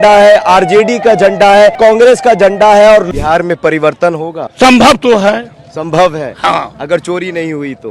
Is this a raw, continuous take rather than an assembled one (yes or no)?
no